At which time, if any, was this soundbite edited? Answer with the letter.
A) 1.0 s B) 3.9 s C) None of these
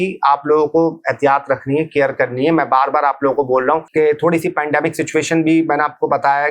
B